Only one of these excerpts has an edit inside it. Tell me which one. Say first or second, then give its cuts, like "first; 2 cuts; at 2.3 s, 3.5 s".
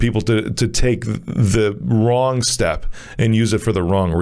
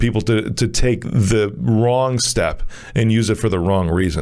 second; 1 cut; at 1.0 s